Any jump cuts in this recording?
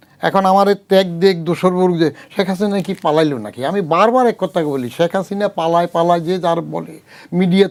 no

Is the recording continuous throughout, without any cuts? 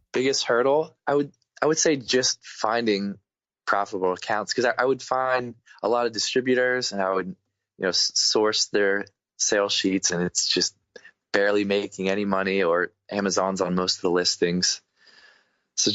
no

